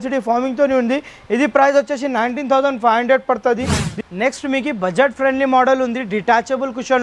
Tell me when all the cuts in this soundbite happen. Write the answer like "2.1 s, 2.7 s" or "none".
none